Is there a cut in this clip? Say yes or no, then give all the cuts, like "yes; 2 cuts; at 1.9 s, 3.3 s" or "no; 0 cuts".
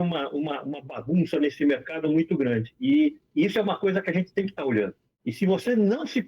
yes; 1 cut; at 5.1 s